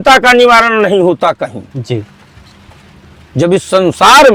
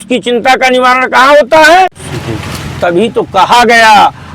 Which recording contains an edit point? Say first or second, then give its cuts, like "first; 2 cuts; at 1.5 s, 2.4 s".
second; 1 cut; at 2.1 s